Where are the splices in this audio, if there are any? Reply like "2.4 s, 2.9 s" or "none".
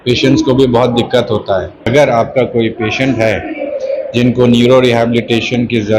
1.9 s